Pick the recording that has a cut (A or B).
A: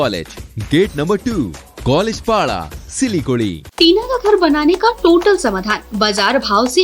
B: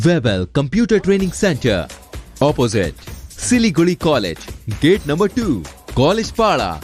A